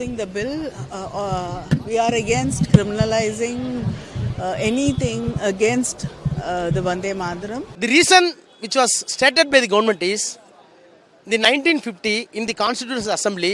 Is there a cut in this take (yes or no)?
yes